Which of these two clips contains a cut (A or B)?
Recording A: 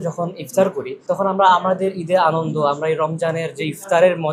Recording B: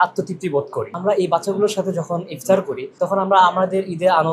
B